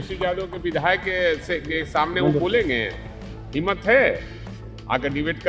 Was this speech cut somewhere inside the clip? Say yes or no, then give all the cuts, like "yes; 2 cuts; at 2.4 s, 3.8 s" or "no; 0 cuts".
no; 0 cuts